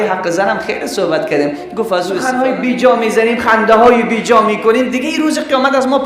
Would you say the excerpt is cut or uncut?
cut